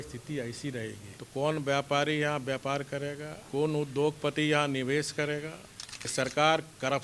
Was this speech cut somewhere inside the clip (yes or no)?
yes